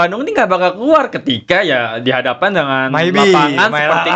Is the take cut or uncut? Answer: uncut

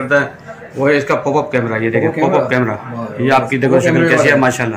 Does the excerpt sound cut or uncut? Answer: uncut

